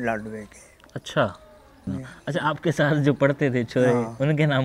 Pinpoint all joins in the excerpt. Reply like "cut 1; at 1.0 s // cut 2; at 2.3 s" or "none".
cut 1; at 1.9 s